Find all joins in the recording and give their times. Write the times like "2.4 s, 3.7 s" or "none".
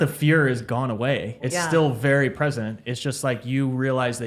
1.4 s